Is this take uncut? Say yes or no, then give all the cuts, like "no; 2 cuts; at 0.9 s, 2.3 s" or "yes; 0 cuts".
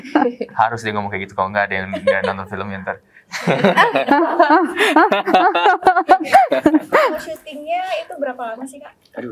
yes; 0 cuts